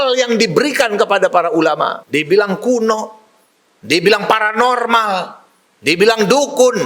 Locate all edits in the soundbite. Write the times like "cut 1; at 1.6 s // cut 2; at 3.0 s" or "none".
cut 1; at 2.0 s